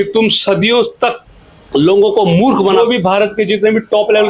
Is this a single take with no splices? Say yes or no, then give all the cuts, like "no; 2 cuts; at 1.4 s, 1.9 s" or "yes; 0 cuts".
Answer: no; 1 cut; at 2.8 s